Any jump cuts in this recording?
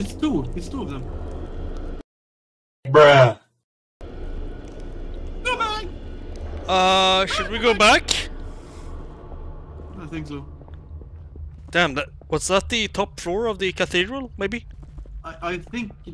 no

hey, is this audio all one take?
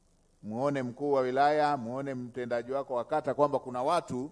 yes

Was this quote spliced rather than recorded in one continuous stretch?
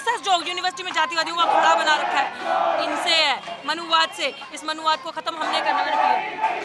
no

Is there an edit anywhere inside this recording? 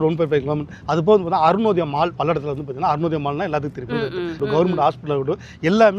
yes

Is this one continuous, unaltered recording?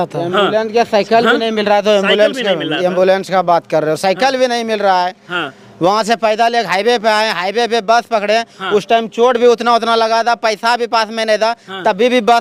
yes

